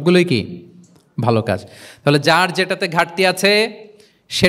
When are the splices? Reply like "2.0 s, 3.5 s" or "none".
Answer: none